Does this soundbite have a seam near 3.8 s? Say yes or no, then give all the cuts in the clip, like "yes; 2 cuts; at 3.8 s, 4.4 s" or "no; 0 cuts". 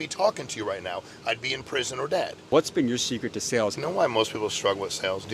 yes; 2 cuts; at 2.5 s, 3.8 s